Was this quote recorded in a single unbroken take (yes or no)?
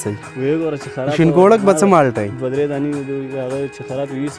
yes